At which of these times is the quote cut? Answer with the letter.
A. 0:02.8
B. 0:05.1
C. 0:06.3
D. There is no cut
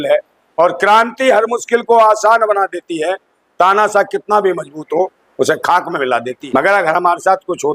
C